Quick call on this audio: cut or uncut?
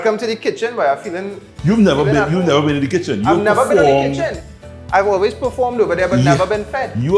uncut